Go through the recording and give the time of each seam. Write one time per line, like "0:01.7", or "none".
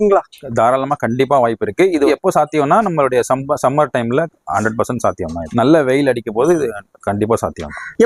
none